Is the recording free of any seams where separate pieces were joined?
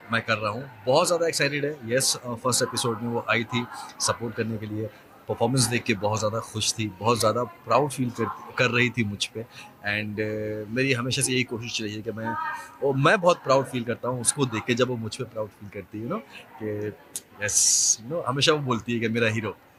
yes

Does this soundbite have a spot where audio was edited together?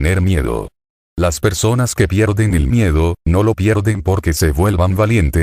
no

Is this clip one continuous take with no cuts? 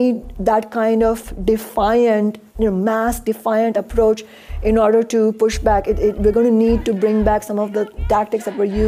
yes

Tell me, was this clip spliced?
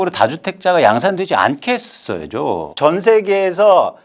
yes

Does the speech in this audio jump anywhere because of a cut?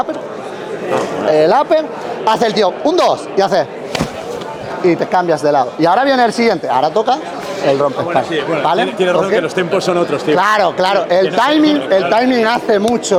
no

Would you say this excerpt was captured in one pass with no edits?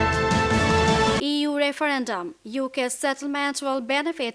yes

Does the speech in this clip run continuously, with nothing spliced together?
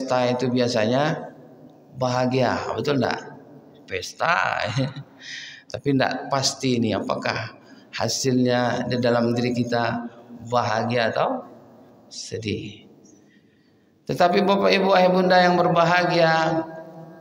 yes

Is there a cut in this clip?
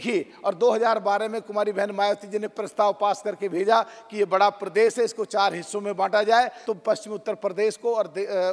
yes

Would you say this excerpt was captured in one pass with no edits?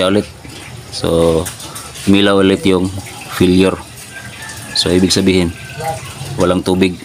yes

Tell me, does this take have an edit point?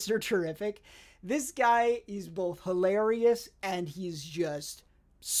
no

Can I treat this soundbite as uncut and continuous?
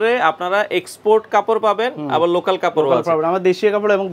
yes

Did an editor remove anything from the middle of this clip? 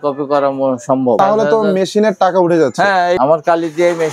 yes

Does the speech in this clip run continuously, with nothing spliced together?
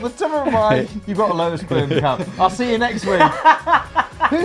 yes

